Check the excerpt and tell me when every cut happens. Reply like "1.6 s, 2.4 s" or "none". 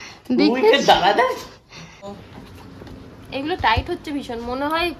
2.0 s